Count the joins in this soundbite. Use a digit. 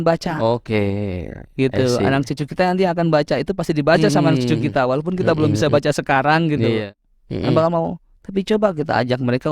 1